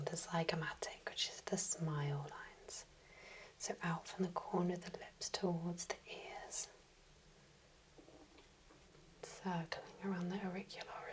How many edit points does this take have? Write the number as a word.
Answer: one